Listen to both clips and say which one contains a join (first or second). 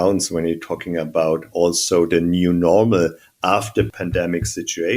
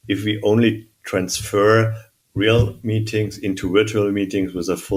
first